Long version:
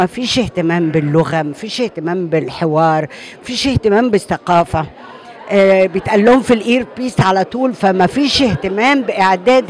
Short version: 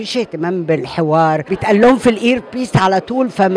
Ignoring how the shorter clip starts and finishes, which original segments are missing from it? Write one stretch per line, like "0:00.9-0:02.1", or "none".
0:03.2-0:06.0